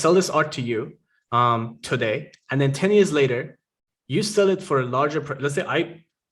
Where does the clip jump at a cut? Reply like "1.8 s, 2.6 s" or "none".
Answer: none